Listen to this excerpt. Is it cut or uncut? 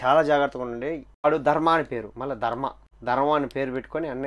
cut